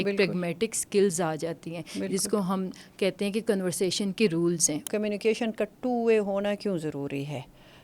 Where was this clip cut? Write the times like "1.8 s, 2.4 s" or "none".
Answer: 4.8 s